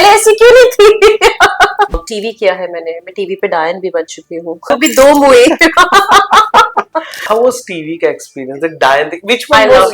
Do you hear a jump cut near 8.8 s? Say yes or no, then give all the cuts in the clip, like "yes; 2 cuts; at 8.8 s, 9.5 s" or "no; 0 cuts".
no; 3 cuts; at 2.0 s, 4.6 s, 7.1 s